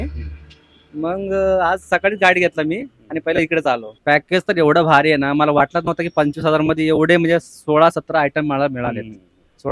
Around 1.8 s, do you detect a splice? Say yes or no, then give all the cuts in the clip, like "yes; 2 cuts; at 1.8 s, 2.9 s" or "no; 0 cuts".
no; 1 cut; at 3.9 s